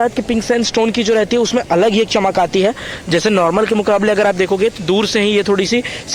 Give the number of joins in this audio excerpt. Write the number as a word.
zero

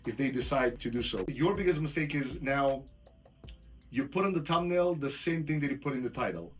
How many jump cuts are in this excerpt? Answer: one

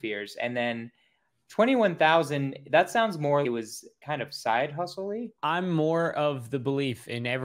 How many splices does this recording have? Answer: one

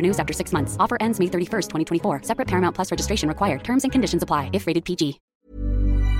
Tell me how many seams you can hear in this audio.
one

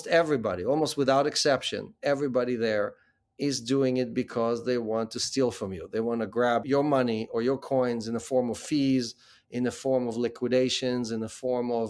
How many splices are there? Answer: zero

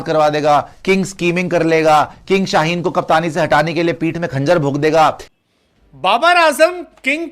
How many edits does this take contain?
one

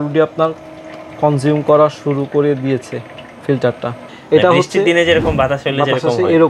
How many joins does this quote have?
one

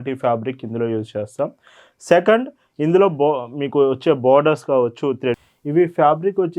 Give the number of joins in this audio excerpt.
one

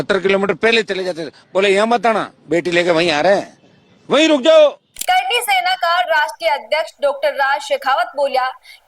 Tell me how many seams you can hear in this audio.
one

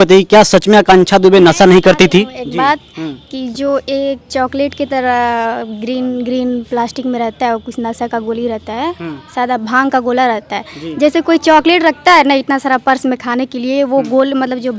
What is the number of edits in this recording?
zero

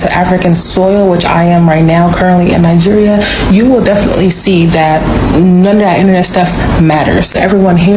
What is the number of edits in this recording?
zero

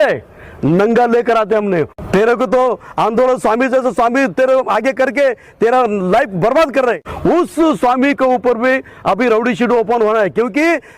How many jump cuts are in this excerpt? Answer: two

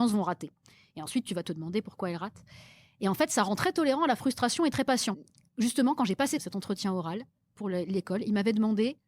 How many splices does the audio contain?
two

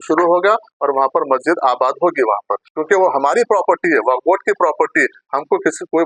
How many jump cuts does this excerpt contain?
one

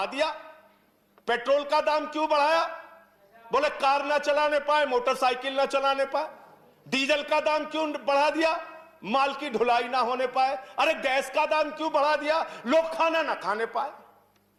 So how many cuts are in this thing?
zero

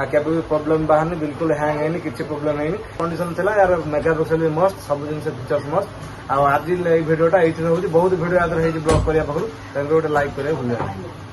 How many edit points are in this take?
zero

